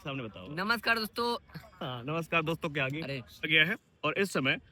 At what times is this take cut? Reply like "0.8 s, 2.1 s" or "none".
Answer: 3.5 s